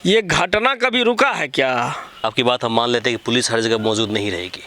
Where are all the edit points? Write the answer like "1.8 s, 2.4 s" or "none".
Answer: 2.2 s